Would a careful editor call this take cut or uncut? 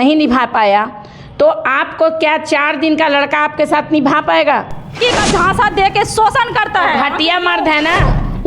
cut